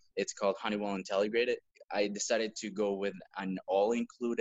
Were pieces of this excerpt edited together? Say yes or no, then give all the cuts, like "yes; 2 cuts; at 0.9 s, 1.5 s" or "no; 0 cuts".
yes; 1 cut; at 1.7 s